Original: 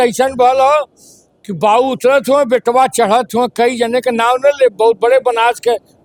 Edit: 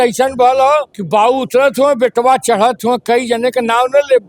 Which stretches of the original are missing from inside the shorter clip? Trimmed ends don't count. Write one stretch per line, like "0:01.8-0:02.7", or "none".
0:00.9-0:01.5